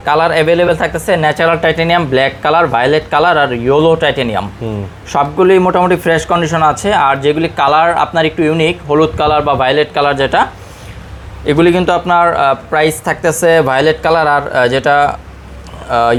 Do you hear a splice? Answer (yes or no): no